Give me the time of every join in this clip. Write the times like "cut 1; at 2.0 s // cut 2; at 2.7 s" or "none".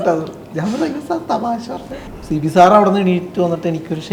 cut 1; at 2.1 s